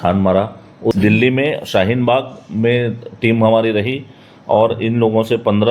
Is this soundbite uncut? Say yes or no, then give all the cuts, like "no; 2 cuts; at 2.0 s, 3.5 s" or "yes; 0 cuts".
no; 1 cut; at 0.9 s